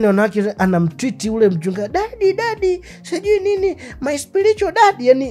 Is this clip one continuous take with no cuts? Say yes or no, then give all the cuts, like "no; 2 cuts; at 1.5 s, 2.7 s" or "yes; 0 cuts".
yes; 0 cuts